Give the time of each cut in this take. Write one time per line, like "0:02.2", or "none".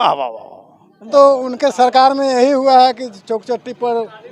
0:01.1